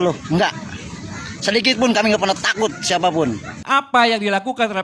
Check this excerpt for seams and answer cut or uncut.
cut